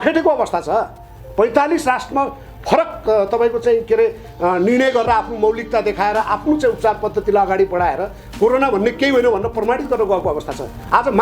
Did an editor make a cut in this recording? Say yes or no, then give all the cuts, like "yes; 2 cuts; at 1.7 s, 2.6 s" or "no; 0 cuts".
no; 0 cuts